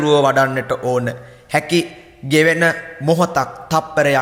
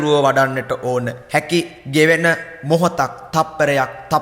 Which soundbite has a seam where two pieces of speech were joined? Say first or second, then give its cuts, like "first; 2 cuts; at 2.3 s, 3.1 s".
second; 1 cut; at 1.5 s